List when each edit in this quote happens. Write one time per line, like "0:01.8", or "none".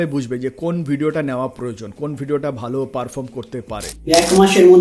0:03.9